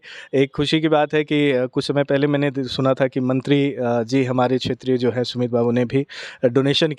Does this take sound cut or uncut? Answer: uncut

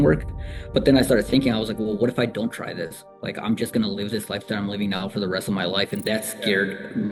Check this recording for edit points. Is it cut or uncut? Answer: uncut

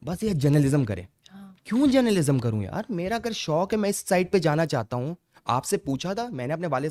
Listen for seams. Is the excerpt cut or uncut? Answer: uncut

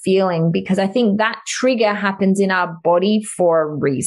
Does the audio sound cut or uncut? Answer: uncut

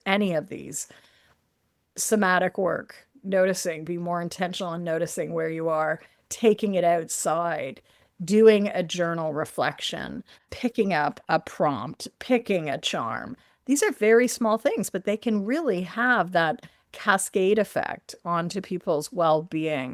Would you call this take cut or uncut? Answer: uncut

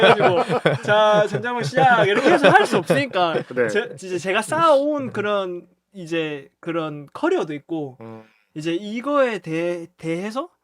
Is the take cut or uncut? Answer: uncut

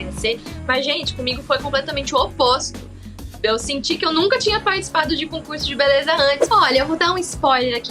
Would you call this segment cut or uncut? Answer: cut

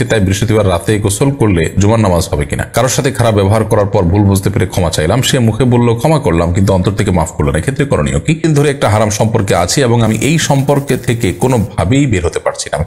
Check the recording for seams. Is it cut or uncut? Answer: cut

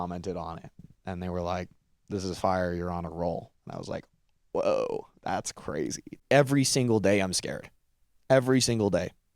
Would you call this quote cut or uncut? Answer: cut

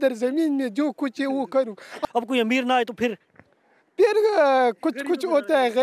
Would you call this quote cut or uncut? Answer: cut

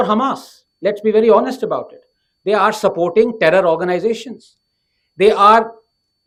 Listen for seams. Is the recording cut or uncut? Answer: uncut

